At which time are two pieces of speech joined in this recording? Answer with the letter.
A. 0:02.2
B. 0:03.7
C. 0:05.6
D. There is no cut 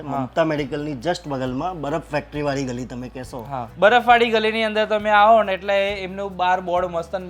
B